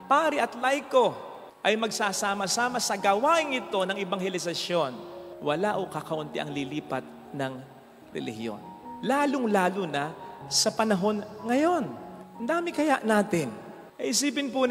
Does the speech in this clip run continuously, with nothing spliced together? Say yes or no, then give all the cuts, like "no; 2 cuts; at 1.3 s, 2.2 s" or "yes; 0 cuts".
yes; 0 cuts